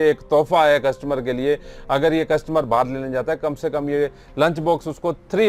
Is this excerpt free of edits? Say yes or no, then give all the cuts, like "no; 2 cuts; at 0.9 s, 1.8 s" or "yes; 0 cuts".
yes; 0 cuts